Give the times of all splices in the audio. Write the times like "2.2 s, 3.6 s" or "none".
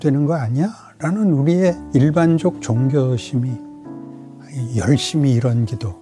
1.8 s